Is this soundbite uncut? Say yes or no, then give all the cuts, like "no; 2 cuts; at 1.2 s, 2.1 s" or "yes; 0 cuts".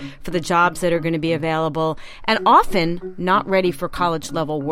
yes; 0 cuts